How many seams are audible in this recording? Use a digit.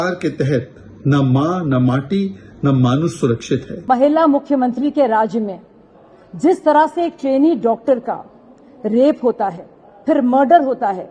1